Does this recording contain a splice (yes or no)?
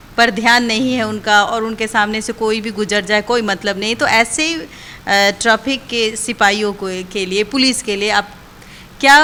no